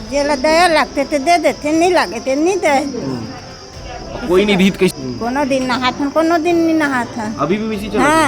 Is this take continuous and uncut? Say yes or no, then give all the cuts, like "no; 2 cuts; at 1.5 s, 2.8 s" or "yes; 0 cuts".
no; 1 cut; at 4.9 s